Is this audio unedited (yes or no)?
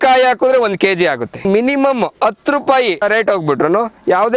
no